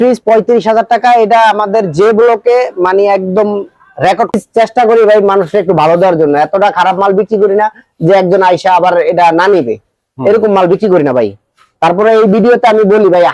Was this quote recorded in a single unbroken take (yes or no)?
no